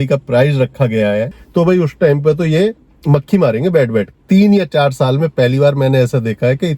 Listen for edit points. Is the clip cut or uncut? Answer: cut